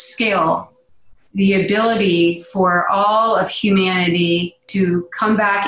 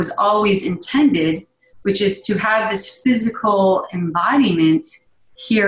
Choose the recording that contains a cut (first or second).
first